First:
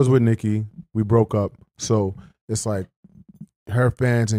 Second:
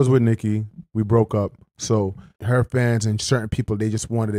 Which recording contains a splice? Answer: second; 1 cut; at 2.3 s

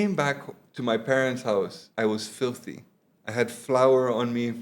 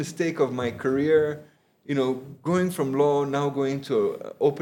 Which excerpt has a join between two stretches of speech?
first; 1 cut; at 1.8 s

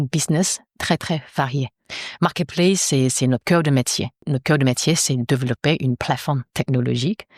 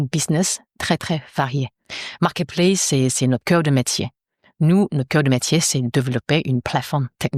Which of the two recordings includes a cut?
first; 1 cut; at 4.3 s

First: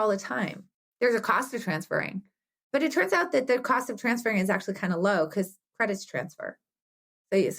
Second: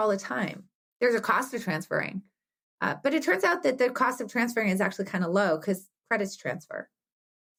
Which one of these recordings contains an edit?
first; 1 cut; at 2.7 s

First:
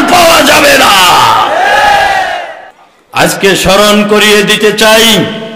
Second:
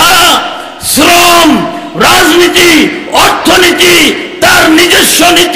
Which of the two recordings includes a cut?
first; 1 cut; at 2.4 s

